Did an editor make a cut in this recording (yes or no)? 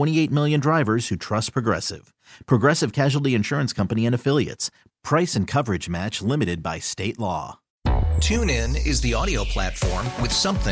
yes